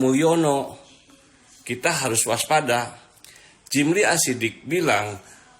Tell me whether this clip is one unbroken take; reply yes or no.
yes